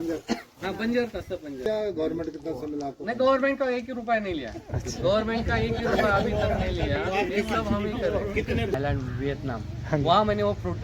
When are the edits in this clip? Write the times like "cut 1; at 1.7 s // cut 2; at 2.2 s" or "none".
cut 1; at 1.7 s // cut 2; at 8.7 s